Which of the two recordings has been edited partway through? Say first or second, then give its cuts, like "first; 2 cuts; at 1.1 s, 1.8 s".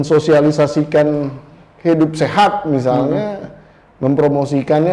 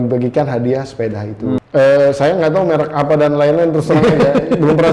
second; 1 cut; at 1.6 s